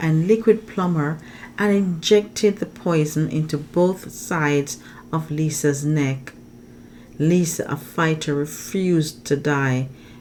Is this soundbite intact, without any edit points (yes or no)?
yes